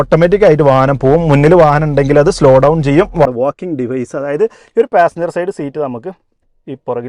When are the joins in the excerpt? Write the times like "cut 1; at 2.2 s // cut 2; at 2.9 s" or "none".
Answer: cut 1; at 3.2 s